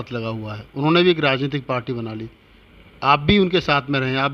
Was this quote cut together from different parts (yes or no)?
no